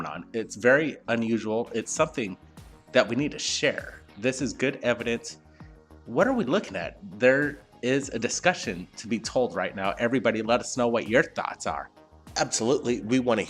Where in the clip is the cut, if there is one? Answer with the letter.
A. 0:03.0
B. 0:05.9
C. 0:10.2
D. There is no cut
C